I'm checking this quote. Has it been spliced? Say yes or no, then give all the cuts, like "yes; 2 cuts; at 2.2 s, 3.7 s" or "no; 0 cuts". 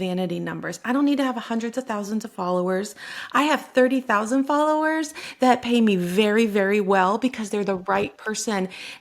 no; 0 cuts